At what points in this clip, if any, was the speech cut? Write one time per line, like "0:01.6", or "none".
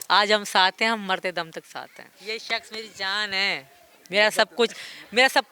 0:02.1